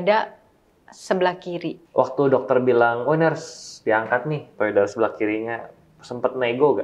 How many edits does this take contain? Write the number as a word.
one